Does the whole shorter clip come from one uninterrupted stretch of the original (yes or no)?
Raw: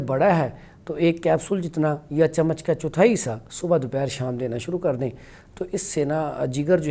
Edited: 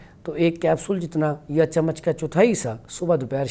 yes